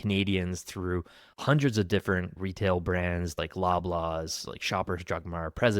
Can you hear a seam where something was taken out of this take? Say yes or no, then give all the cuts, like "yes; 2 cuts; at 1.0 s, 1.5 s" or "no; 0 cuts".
yes; 2 cuts; at 2.3 s, 3.3 s